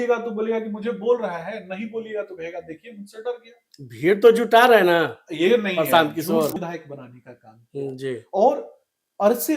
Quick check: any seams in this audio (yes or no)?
yes